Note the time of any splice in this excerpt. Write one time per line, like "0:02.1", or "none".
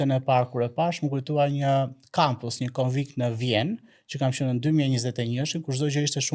none